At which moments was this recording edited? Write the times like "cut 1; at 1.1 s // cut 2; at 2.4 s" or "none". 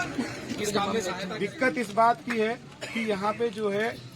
cut 1; at 1.4 s